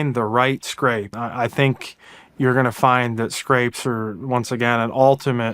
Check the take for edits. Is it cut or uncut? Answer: cut